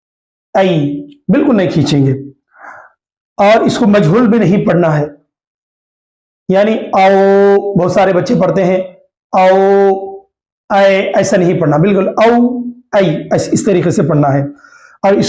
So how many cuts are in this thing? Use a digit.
0